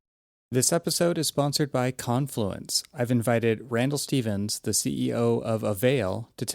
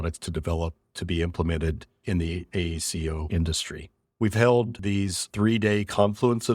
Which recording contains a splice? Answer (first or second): second